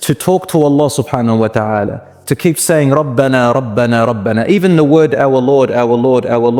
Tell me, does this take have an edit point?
no; 0 cuts

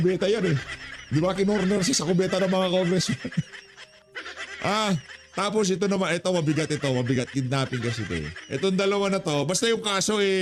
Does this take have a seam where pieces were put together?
no; 0 cuts

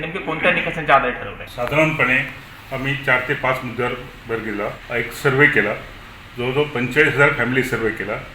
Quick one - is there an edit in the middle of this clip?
yes; 2 cuts; at 1.4 s, 4.8 s

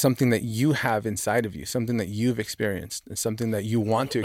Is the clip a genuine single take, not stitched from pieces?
yes; 0 cuts

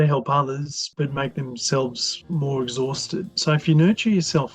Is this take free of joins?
no; 2 cuts; at 0.8 s, 2.1 s

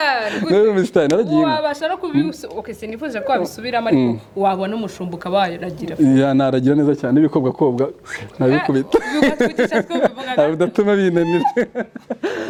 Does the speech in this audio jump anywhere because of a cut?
no; 0 cuts

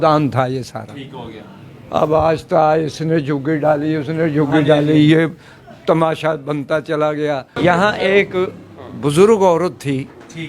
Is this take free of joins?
no; 1 cut; at 7.6 s

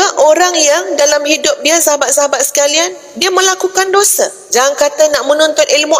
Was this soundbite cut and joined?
yes; 1 cut; at 4.4 s

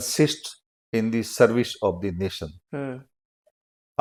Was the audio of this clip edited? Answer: no; 0 cuts

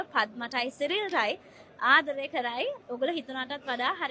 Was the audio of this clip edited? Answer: yes; 1 cut; at 2.8 s

